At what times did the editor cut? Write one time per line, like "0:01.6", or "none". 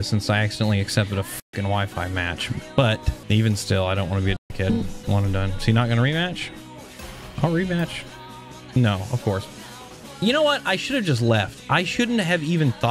0:03.1